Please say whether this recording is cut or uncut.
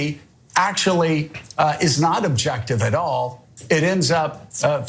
uncut